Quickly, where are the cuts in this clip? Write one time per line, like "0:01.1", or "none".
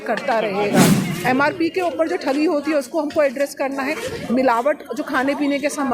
0:01.1